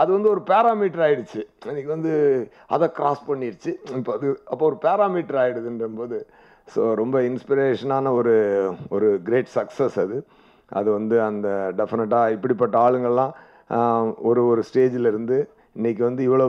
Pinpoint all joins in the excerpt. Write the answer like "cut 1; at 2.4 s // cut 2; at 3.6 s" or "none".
none